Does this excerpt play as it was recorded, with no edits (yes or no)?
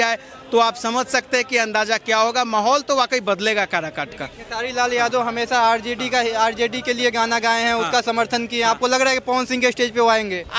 yes